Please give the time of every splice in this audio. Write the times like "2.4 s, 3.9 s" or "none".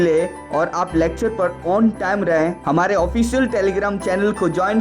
2.3 s